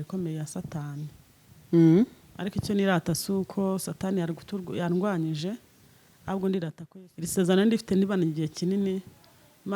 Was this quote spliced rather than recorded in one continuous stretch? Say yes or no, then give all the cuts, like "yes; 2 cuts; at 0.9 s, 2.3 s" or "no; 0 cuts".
yes; 1 cut; at 6.8 s